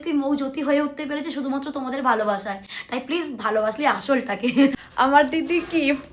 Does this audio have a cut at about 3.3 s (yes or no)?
no